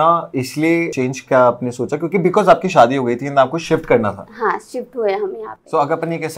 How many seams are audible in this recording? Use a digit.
1